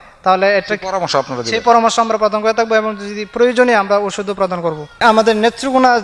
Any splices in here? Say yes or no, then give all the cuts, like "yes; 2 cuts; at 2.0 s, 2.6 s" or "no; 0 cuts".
yes; 1 cut; at 5.0 s